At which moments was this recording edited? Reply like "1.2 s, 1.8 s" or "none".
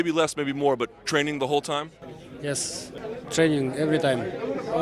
2.9 s